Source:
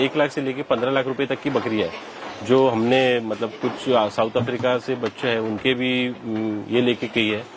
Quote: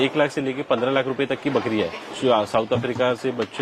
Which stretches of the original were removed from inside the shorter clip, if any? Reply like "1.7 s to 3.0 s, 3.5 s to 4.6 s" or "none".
2.1 s to 3.7 s